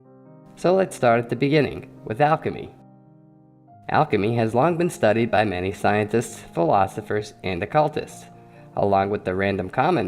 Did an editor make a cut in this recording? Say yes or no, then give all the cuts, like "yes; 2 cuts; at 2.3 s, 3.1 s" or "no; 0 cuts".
yes; 1 cut; at 7.2 s